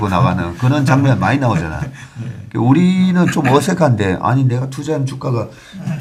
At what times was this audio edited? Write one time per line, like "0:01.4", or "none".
none